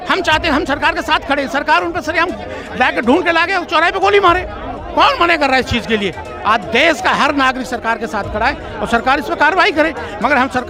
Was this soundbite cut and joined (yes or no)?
no